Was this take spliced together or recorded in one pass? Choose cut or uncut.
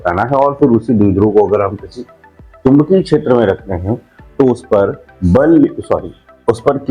uncut